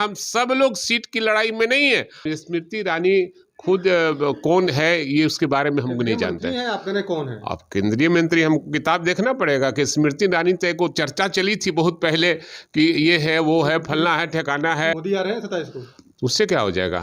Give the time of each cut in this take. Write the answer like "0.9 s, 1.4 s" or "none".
2.2 s, 15.0 s

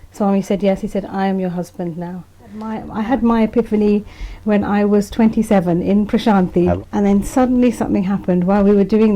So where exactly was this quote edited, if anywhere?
2.9 s, 6.8 s

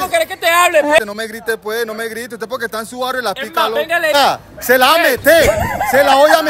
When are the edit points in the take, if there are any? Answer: 1.0 s, 4.1 s

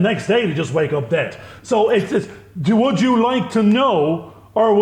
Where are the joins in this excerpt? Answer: none

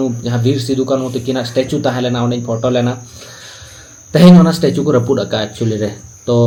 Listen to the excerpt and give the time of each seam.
none

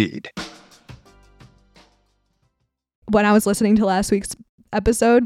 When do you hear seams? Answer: 3.0 s

